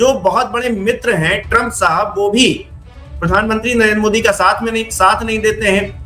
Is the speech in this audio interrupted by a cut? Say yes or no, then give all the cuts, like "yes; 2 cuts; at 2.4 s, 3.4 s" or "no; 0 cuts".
no; 0 cuts